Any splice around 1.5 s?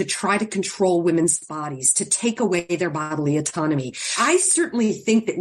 no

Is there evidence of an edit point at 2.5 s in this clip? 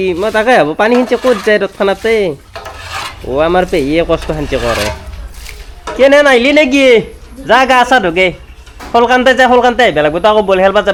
no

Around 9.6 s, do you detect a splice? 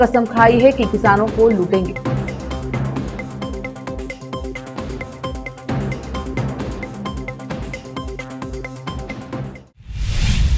yes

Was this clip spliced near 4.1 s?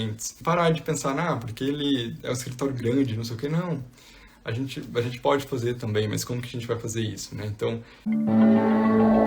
no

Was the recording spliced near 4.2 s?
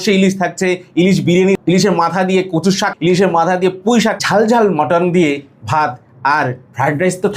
yes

